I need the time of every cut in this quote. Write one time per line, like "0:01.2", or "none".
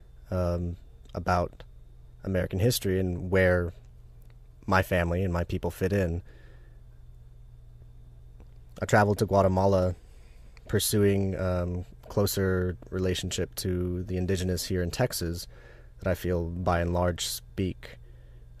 none